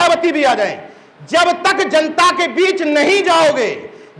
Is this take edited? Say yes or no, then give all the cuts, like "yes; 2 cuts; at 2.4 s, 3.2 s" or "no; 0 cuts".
no; 0 cuts